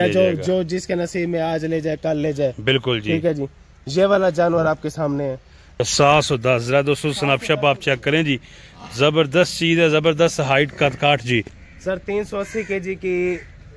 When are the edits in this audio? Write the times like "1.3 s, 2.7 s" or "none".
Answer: 5.8 s, 11.6 s